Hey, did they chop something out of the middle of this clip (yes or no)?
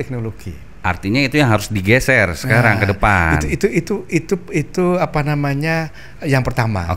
no